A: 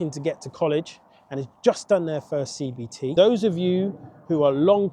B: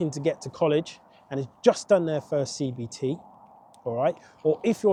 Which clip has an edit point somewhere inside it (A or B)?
A